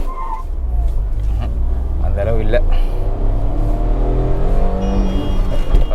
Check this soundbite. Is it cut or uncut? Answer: uncut